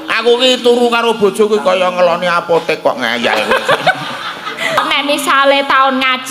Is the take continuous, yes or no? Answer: no